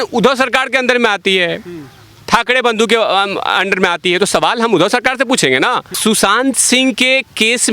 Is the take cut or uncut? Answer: cut